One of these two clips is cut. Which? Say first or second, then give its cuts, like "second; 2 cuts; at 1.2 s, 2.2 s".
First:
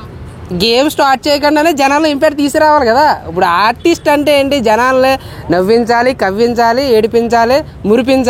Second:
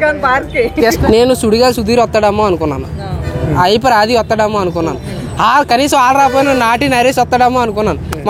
second; 1 cut; at 1.0 s